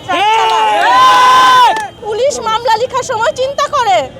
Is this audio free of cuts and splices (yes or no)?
no